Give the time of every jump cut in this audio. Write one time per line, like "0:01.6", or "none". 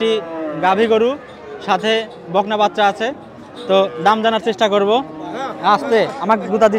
none